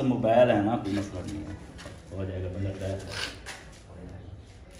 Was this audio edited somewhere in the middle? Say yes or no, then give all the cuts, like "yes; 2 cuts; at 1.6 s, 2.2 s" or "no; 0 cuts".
no; 0 cuts